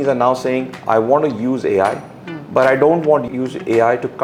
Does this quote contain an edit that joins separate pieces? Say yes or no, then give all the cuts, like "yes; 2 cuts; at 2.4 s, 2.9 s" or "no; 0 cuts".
no; 0 cuts